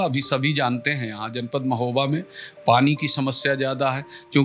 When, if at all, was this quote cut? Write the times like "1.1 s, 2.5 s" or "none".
none